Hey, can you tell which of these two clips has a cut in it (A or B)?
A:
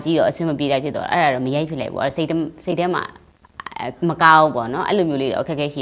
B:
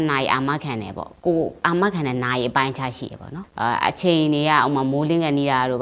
B